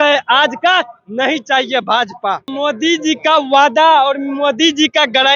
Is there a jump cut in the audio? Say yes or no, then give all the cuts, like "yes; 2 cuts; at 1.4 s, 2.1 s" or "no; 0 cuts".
yes; 1 cut; at 2.5 s